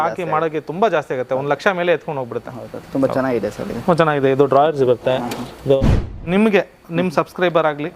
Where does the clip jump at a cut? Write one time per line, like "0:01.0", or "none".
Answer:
0:06.0